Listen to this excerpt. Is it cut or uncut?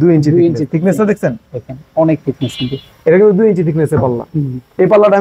uncut